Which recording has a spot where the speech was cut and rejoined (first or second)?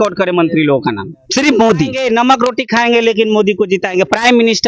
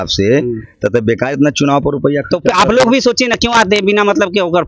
first